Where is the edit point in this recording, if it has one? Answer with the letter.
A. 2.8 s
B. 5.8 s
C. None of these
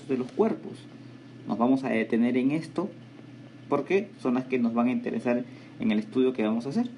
B